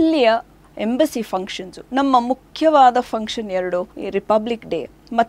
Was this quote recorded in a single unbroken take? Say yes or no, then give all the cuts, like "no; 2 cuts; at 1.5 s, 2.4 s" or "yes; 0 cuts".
no; 1 cut; at 4.0 s